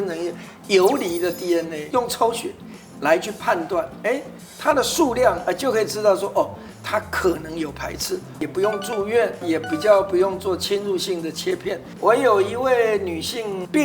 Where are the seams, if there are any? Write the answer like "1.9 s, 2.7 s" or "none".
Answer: 1.8 s, 8.4 s, 11.9 s